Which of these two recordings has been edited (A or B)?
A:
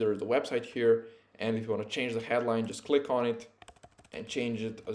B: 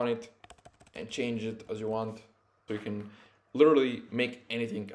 B